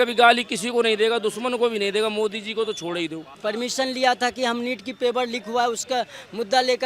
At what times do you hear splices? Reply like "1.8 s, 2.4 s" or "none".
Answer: 3.4 s